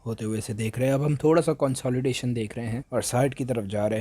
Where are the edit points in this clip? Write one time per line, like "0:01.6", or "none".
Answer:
0:02.8

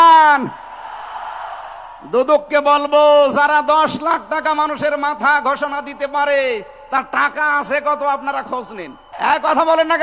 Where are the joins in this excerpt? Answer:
0:09.0

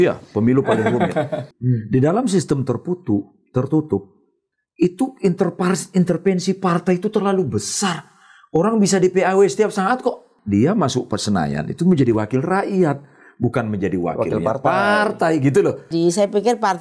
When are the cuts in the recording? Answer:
0:01.5
0:10.3
0:15.9

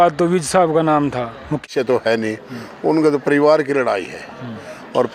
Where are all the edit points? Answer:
0:01.6

